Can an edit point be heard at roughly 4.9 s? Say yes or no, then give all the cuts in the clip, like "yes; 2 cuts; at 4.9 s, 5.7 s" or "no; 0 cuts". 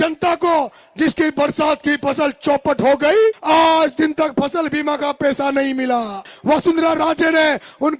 no; 2 cuts; at 3.4 s, 6.3 s